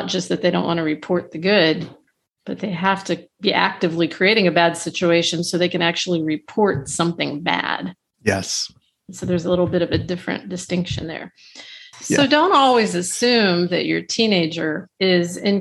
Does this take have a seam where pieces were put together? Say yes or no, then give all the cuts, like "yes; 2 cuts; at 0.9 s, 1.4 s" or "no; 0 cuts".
yes; 1 cut; at 11.9 s